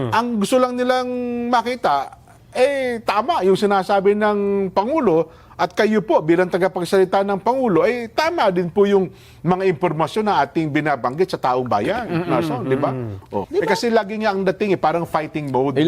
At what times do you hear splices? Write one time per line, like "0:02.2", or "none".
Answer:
0:13.4

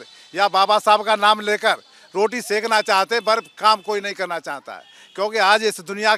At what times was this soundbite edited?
none

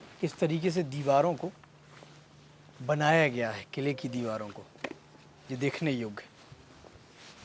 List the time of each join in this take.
none

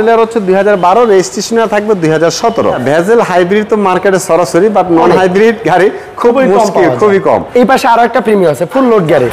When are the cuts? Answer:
0:02.8
0:07.5

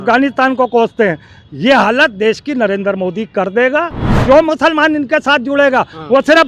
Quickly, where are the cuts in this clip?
0:04.1

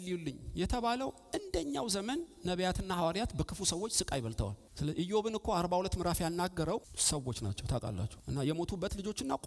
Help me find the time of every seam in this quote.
0:04.6
0:06.9
0:08.2

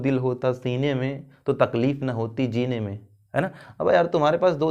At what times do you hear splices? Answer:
none

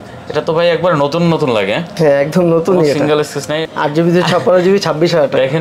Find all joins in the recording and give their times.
0:03.6

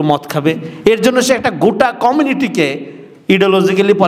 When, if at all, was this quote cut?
none

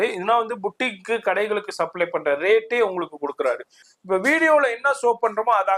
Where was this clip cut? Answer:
0:03.9

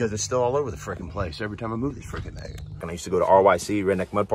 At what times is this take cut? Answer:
0:02.9

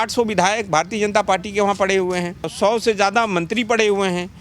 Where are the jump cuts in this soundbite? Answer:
0:02.5

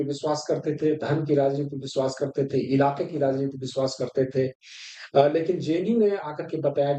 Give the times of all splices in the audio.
none

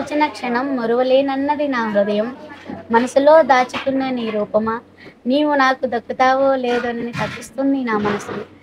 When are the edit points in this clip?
none

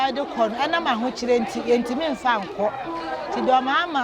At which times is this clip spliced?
none

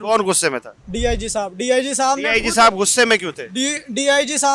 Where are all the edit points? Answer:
none

